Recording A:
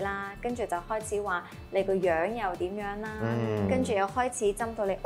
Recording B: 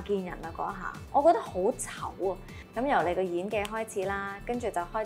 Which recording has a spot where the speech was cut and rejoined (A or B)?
B